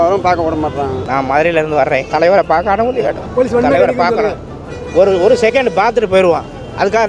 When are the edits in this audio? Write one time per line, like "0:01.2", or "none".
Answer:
0:01.0
0:02.1
0:03.2